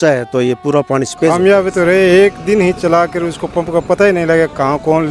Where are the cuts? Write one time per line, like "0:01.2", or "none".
0:01.3